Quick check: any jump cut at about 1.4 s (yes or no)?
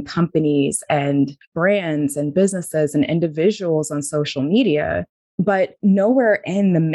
yes